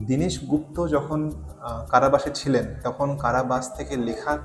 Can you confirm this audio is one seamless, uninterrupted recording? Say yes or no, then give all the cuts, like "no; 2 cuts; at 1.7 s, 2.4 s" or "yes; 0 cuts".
yes; 0 cuts